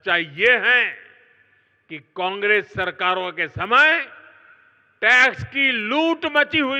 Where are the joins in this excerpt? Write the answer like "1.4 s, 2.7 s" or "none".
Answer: none

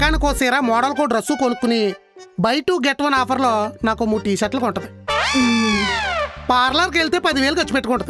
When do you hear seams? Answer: none

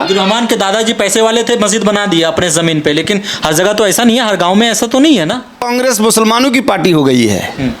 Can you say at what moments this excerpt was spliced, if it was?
5.7 s

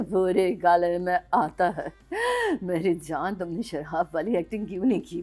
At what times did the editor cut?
none

